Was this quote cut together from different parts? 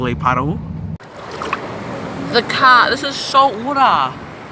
yes; 1 cut; at 1.0 s

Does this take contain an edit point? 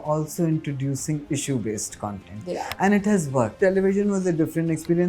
yes; 1 cut; at 3.6 s

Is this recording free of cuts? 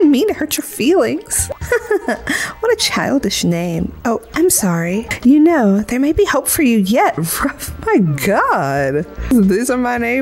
no; 3 cuts; at 1.5 s, 5.1 s, 9.3 s

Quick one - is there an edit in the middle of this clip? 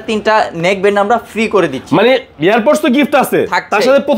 no; 0 cuts

